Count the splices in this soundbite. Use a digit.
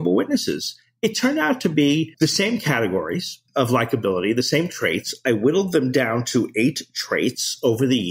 2